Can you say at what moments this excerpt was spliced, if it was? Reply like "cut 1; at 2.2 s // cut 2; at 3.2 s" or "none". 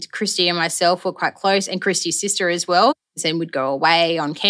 cut 1; at 3.0 s